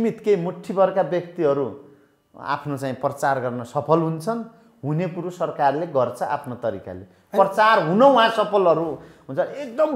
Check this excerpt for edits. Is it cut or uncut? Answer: uncut